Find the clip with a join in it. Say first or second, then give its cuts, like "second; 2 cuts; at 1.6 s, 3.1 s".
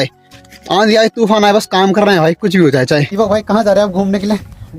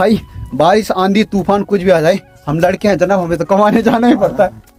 first; 1 cut; at 3.1 s